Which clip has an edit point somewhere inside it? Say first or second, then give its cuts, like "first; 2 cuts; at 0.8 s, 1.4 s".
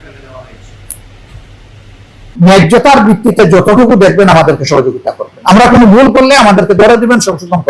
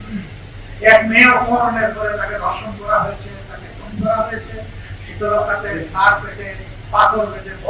first; 1 cut; at 2.3 s